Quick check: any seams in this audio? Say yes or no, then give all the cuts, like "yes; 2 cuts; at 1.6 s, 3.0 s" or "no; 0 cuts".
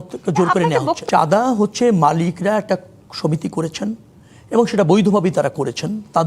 yes; 1 cut; at 1.0 s